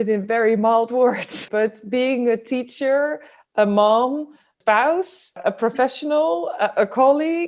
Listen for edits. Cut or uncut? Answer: cut